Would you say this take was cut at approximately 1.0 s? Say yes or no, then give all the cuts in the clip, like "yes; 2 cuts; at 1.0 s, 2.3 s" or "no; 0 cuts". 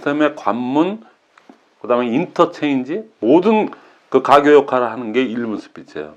no; 0 cuts